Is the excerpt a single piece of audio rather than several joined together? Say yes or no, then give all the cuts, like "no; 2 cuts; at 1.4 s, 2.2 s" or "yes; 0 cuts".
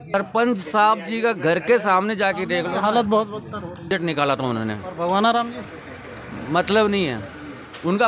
no; 1 cut; at 3.9 s